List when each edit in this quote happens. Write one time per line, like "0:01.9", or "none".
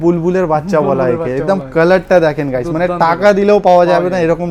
none